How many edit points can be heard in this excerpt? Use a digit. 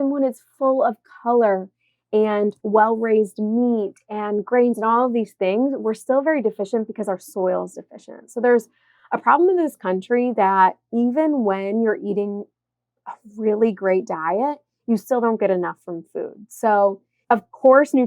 2